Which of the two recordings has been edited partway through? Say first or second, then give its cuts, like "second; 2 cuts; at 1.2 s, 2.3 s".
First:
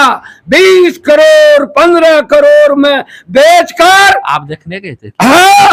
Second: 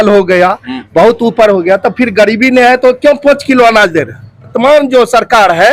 second; 1 cut; at 4.5 s